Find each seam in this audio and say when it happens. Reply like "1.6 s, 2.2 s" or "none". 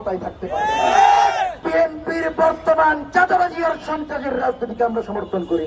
1.6 s